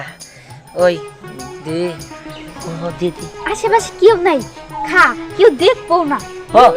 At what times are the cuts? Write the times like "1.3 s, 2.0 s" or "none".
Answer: 2.6 s